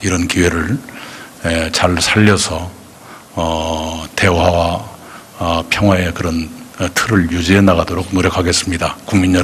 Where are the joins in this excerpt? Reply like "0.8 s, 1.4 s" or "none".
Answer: 5.6 s